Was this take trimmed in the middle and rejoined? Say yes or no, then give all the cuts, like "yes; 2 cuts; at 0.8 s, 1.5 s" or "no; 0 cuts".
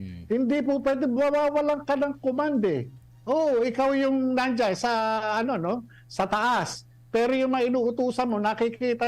no; 0 cuts